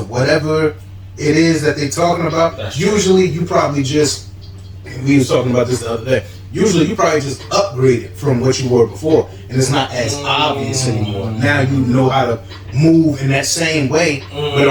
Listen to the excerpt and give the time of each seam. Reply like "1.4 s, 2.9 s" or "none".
none